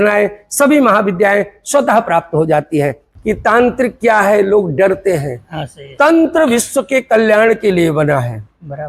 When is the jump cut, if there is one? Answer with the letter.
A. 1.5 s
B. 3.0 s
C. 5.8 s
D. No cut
B